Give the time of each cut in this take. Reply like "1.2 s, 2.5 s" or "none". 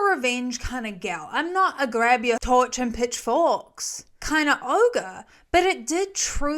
2.4 s